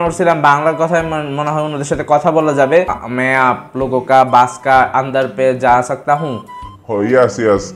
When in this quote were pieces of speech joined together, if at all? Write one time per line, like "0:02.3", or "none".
0:03.0

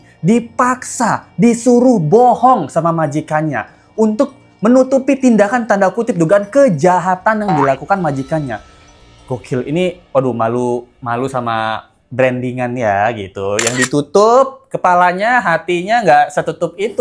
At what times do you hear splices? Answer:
none

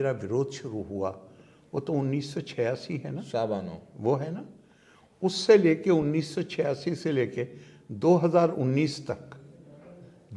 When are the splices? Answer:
none

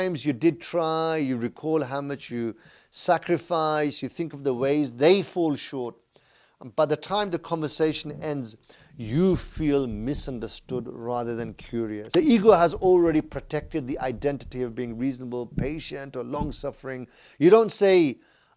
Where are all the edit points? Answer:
0:12.0

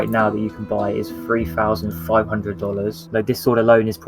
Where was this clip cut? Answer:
0:03.0

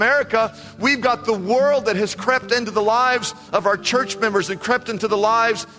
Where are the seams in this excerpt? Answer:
none

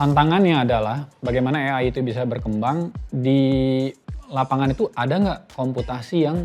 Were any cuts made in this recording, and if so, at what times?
0:03.0

